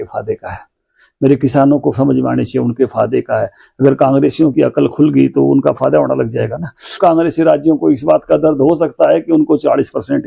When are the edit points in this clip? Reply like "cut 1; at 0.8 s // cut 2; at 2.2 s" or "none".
cut 1; at 7.0 s